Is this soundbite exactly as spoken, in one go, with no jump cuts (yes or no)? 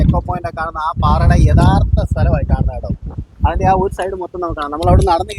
yes